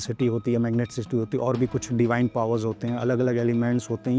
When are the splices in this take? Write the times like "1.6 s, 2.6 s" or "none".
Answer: none